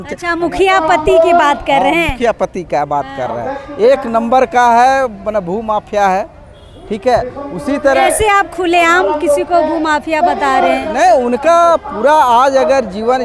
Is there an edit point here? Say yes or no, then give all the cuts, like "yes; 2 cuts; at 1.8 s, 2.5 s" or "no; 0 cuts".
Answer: no; 0 cuts